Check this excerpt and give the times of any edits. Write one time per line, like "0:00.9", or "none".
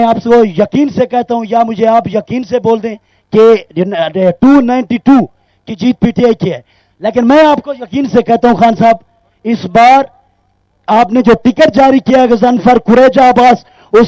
none